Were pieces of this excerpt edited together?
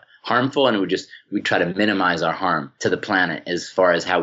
yes; 2 cuts; at 1.2 s, 2.7 s

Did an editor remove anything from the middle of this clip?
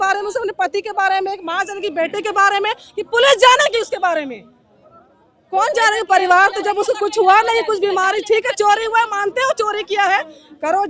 no; 0 cuts

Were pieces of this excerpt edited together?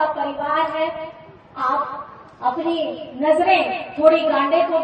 no; 0 cuts

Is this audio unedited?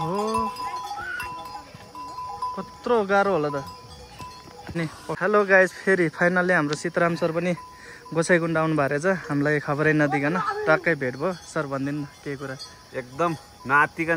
no; 1 cut; at 4.7 s

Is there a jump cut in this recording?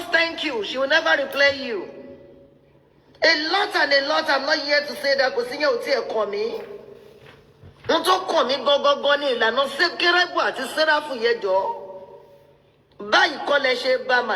yes; 1 cut; at 3.1 s

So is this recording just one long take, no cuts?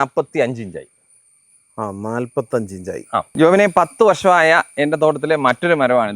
no; 1 cut; at 3.3 s

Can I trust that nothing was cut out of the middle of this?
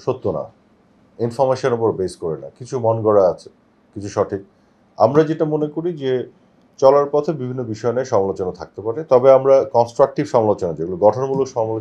yes; 0 cuts

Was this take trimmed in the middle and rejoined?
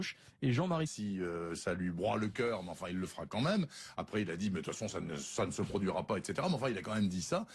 no; 0 cuts

